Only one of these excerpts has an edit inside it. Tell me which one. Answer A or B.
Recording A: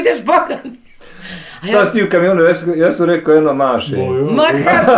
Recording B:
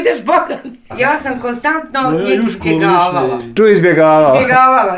B